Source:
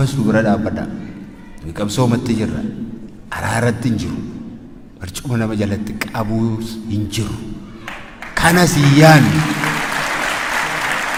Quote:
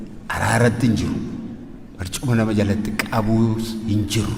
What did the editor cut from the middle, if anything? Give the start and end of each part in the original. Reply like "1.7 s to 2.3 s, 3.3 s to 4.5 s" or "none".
none